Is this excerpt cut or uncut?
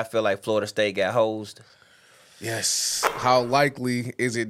cut